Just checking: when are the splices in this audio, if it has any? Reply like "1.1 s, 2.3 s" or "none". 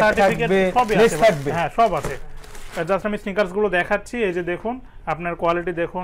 none